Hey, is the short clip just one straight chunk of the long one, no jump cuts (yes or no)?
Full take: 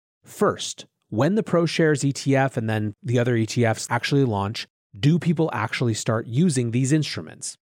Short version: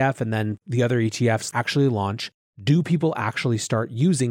yes